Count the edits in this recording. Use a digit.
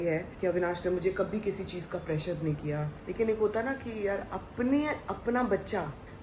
1